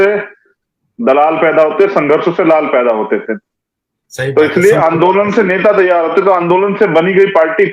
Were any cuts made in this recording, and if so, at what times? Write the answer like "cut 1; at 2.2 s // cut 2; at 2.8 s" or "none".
none